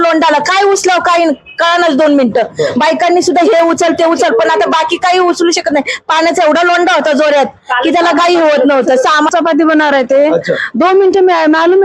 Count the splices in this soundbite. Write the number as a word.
one